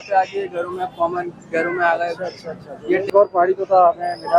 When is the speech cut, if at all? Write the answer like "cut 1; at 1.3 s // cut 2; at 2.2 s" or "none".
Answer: cut 1; at 3.1 s

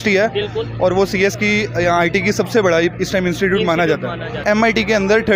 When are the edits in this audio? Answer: cut 1; at 4.4 s

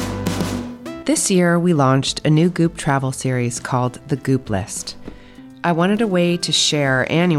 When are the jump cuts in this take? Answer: cut 1; at 1.0 s

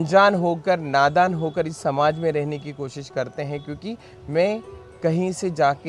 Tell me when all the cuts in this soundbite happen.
none

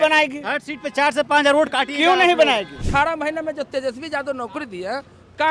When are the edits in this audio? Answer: cut 1; at 2.7 s

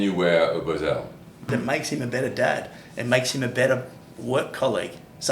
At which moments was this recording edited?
cut 1; at 1.5 s

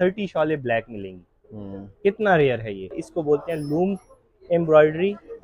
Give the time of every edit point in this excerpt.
cut 1; at 3.0 s

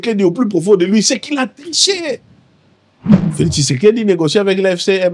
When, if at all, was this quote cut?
cut 1; at 3.0 s

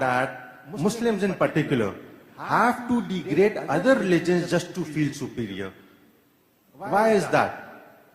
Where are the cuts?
none

